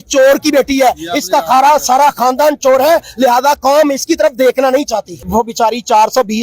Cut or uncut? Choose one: cut